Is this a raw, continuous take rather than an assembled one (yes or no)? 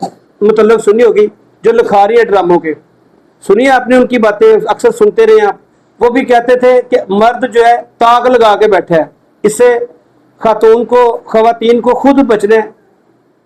yes